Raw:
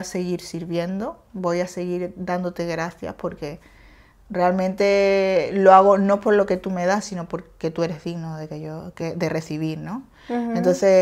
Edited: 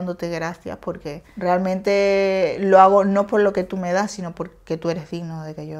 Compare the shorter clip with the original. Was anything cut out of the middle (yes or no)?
yes